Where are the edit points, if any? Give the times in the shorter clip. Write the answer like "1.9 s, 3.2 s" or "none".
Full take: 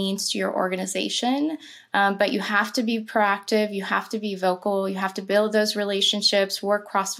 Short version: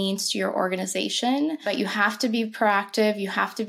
1.7 s

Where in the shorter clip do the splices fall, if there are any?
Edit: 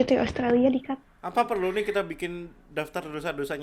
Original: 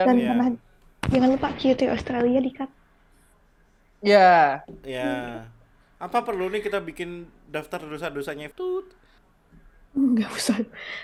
1.1 s

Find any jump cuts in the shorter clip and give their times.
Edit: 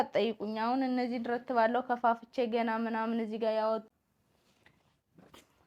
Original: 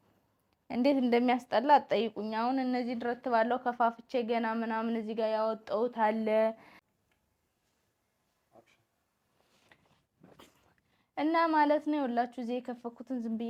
3.9 s

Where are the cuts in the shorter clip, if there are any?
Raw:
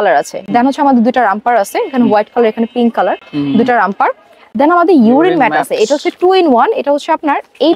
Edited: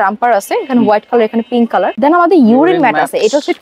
1.9 s

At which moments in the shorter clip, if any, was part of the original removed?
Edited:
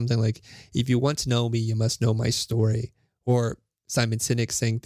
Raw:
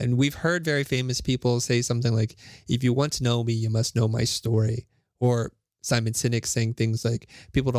none

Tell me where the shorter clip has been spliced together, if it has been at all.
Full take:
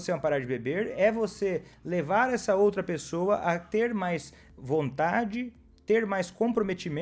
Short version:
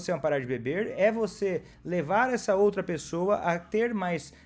none

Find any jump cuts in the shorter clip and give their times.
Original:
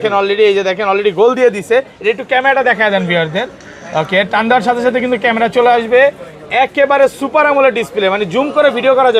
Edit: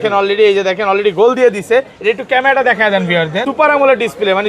3.5 s

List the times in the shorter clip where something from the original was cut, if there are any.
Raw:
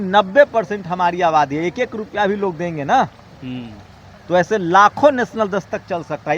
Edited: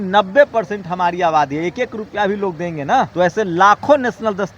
3.1 s

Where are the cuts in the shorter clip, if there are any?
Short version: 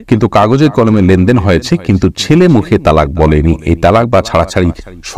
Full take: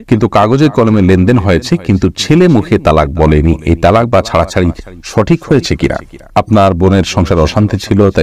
none

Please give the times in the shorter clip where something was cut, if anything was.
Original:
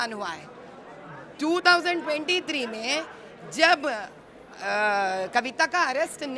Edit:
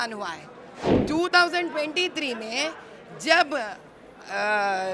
0.9 s

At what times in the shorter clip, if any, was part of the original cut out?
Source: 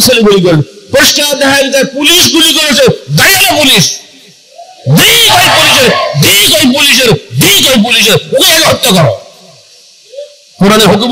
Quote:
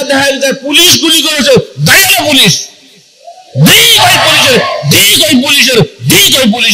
none

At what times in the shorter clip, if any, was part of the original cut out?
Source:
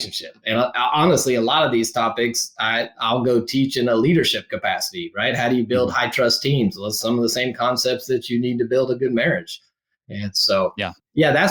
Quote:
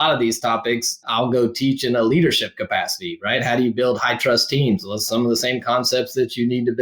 1.0 s

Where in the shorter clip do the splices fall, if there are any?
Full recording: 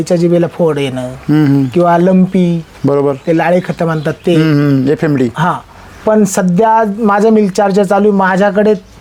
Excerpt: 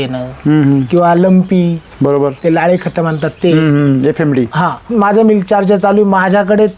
4.9 s

